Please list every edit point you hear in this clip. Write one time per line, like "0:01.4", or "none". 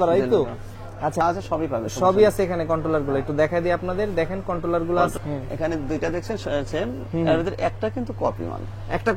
0:01.2
0:05.1